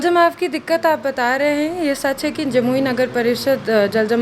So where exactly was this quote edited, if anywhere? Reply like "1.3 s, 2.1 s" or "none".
none